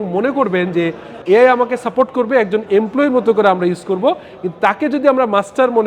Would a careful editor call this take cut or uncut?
cut